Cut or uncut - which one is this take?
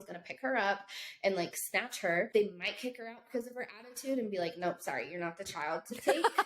cut